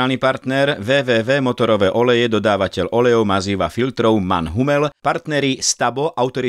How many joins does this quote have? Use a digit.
1